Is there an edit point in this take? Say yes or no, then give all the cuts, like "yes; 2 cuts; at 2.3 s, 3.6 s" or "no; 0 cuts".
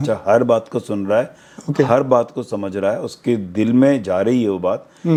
no; 0 cuts